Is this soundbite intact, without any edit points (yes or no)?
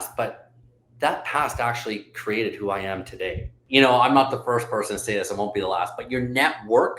no